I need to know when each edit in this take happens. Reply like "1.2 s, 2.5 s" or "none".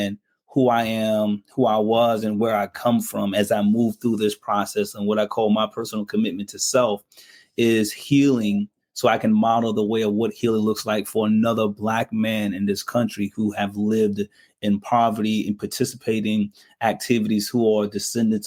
none